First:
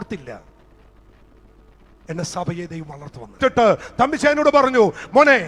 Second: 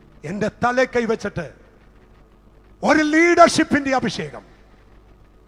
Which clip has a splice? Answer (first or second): first